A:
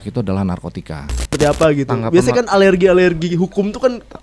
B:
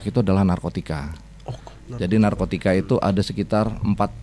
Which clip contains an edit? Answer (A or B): A